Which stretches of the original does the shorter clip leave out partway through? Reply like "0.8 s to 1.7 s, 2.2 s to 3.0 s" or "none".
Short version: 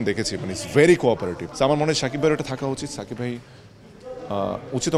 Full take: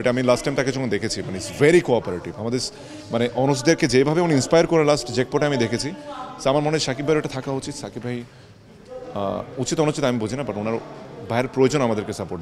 2.3 s to 6.3 s